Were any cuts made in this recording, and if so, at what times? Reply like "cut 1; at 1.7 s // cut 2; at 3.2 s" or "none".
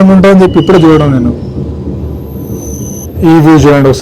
cut 1; at 3.1 s